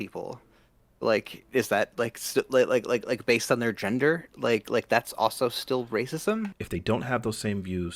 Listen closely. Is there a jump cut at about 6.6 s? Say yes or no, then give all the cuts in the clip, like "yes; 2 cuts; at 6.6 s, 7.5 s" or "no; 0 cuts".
yes; 1 cut; at 6.6 s